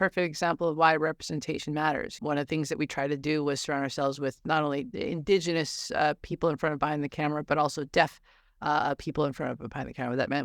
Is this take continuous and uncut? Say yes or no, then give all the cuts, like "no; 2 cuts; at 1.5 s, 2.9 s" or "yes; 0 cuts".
no; 1 cut; at 2.2 s